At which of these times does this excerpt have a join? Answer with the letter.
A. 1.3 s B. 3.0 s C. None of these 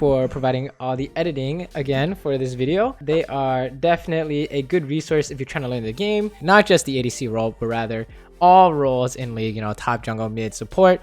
B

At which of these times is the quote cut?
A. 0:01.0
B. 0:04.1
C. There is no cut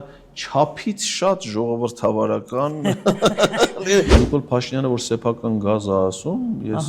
B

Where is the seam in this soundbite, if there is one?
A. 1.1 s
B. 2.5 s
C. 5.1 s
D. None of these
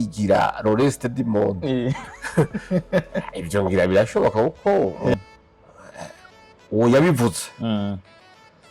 C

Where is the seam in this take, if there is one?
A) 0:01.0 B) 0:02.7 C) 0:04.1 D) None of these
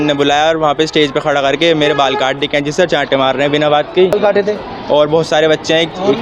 C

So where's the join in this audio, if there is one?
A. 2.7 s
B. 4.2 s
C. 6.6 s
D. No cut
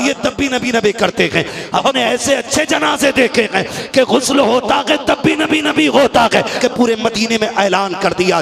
C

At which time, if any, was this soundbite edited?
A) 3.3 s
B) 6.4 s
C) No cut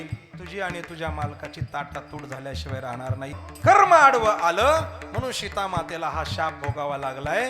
A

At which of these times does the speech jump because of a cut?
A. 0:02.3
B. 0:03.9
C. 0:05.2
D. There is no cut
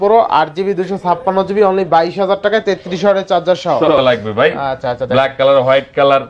B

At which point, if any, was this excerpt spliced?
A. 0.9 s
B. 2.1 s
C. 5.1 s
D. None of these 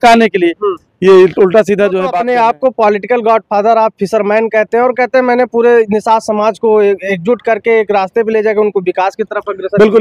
B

